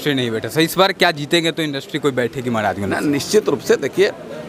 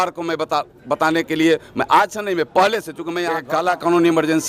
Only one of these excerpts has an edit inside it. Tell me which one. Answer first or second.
second